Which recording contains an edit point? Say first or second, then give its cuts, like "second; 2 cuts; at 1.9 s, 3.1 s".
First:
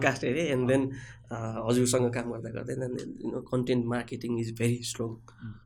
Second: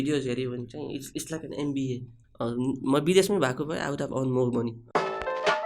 second; 2 cuts; at 2.2 s, 4.8 s